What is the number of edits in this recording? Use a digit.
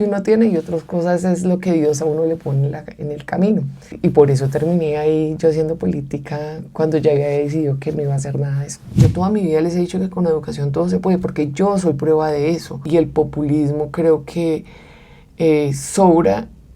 3